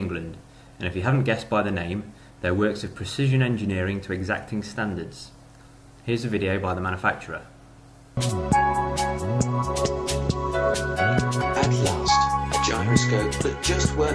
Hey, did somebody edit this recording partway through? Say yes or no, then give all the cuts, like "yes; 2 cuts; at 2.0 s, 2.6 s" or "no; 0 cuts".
yes; 1 cut; at 6.4 s